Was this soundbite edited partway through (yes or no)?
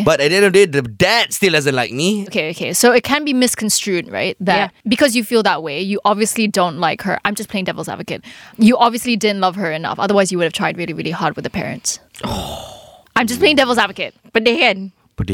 yes